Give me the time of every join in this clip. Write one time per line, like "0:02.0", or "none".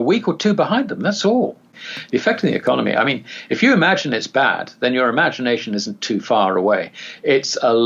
0:01.7